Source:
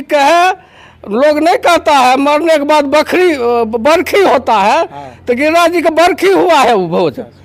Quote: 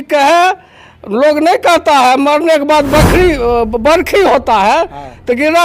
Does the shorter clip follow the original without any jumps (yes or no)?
yes